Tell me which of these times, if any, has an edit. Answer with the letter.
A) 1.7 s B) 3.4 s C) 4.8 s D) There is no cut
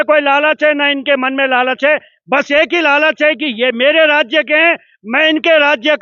D